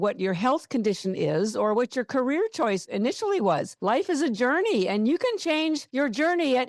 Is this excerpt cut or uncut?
cut